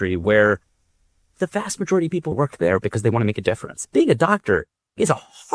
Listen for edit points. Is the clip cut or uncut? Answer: cut